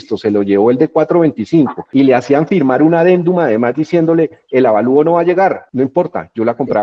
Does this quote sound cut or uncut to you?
uncut